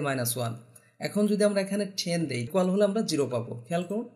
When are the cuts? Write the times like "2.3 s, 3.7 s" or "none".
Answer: 2.5 s

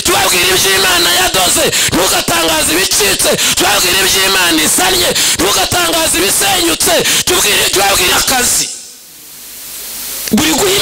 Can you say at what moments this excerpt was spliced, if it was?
8.1 s

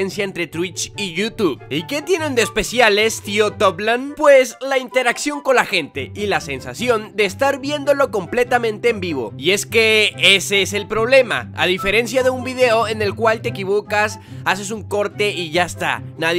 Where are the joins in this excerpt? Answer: none

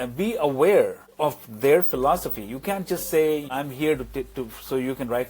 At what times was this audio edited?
1.0 s, 3.5 s

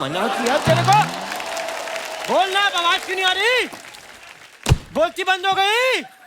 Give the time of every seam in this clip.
none

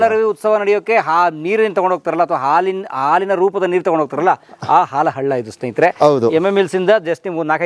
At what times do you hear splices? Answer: none

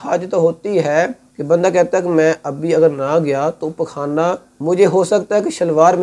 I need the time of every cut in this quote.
1.3 s, 4.5 s

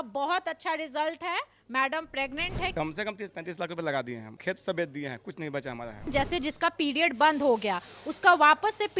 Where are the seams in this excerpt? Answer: 2.7 s, 4.3 s, 6.1 s

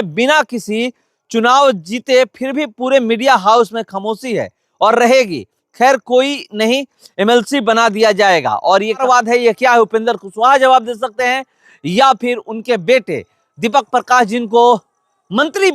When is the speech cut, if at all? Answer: 9.0 s

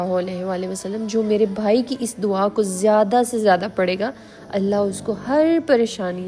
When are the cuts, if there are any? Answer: none

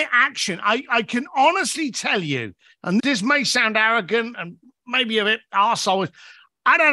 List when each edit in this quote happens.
3.0 s

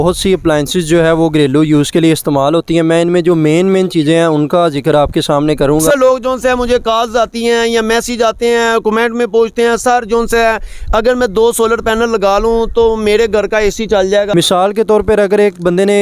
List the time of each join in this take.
5.8 s, 14.3 s

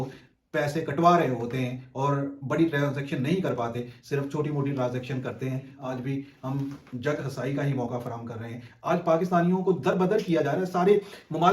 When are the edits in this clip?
5.7 s

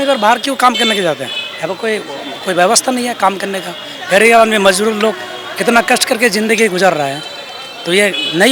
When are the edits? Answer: none

